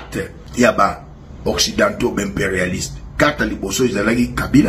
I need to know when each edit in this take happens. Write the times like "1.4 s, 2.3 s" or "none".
none